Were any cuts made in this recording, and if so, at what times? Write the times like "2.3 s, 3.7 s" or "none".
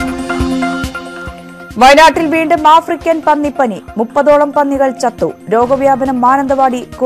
1.2 s